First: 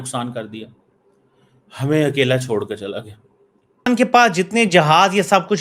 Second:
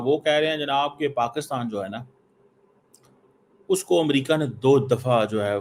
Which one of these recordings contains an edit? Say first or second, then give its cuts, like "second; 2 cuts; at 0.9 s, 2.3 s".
first; 1 cut; at 3.9 s